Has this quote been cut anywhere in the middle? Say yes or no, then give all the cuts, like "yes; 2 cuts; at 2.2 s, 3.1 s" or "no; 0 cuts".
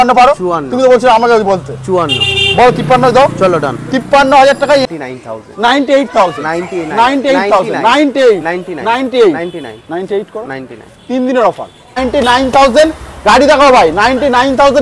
yes; 2 cuts; at 4.9 s, 12.0 s